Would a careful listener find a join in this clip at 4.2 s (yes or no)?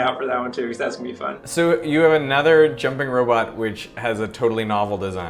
no